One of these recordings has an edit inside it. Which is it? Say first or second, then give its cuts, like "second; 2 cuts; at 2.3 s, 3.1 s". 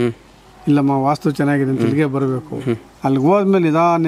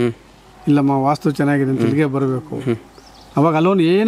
first; 1 cut; at 2.9 s